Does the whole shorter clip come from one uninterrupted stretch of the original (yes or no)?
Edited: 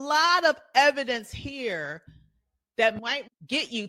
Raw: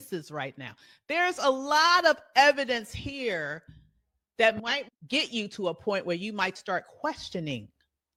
yes